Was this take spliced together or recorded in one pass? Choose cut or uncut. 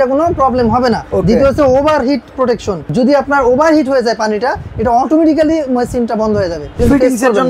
cut